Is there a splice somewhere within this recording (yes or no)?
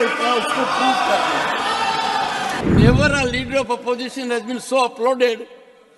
yes